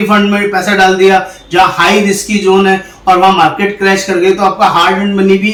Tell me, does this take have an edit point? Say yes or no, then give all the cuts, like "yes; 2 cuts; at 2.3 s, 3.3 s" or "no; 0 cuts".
no; 0 cuts